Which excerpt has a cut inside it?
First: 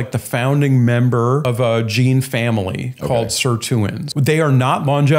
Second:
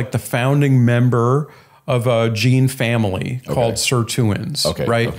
first; 2 cuts; at 1.4 s, 4.0 s

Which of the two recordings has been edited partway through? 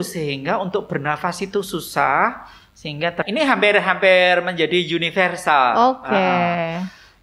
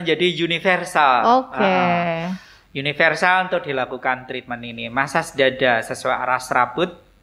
first; 1 cut; at 3.2 s

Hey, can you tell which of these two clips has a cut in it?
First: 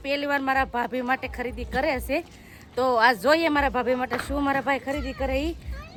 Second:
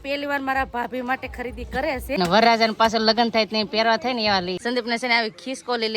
second; 2 cuts; at 2.2 s, 4.6 s

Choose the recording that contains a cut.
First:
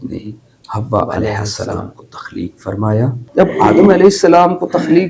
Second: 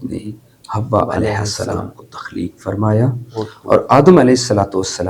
first; 1 cut; at 3.2 s

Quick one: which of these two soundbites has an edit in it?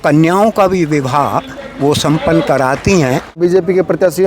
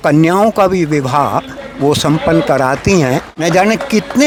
first; 1 cut; at 3.3 s

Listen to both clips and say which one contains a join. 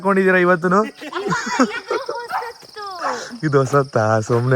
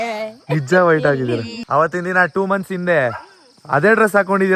second; 1 cut; at 1.6 s

